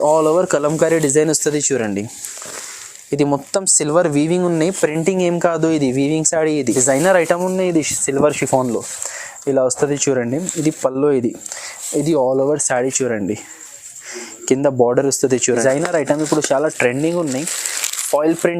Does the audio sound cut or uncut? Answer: cut